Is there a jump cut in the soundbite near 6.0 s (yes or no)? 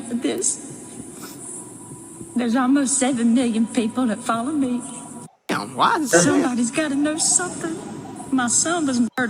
no